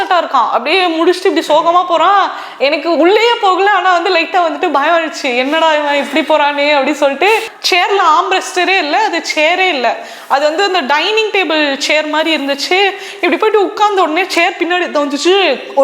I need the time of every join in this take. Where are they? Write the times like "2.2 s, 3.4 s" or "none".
7.5 s